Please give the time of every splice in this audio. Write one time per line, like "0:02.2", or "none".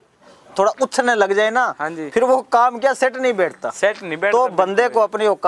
none